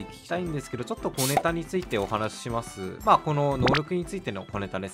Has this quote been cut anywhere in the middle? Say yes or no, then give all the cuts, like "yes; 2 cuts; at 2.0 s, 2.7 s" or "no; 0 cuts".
no; 0 cuts